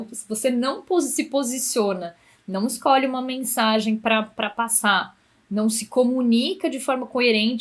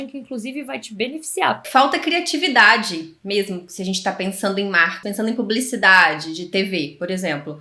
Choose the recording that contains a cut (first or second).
second